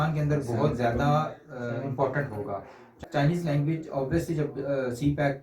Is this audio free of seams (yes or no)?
no